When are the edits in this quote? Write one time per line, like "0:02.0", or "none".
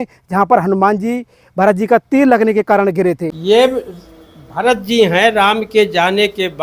0:03.3